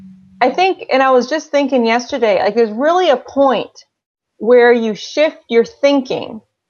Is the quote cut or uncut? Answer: uncut